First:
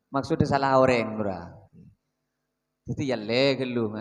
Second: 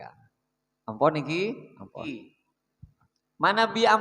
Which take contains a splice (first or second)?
second